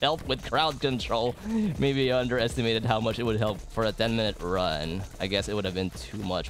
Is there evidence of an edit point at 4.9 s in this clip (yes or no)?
no